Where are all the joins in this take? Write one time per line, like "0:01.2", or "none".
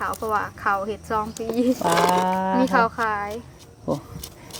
none

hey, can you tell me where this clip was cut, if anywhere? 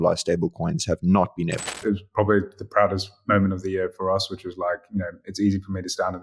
0:01.8

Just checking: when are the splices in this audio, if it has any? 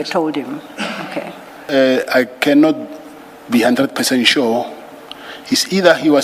0:01.6

